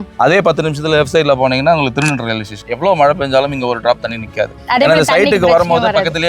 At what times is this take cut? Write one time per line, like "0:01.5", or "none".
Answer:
0:02.6

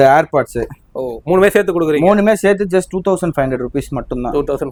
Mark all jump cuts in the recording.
none

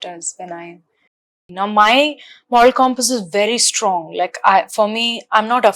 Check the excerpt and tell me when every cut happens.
0:01.1

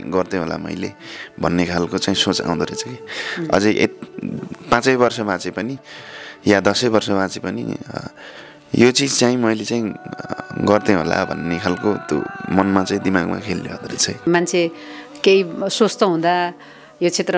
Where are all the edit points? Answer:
0:14.3

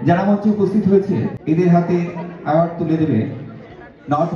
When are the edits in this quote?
0:01.4

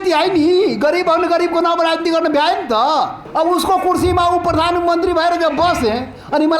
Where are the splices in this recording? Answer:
0:03.2

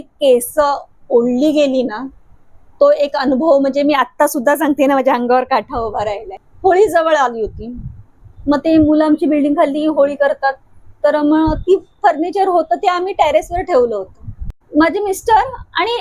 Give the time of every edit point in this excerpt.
0:06.4
0:14.6

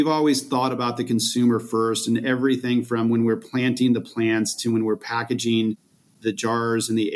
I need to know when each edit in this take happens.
0:06.0

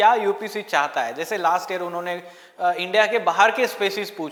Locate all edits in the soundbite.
none

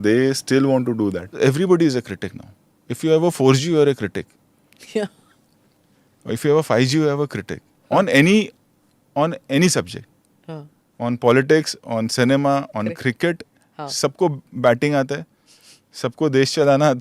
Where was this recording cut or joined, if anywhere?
0:01.4

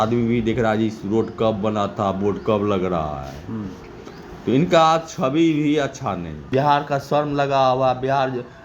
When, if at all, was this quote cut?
0:06.4

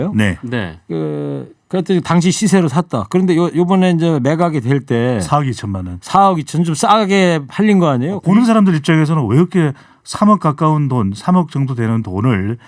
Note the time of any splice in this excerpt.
0:08.1

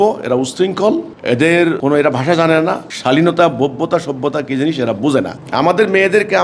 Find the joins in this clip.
0:05.3

